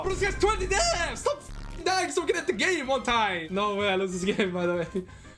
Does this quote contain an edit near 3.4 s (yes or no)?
yes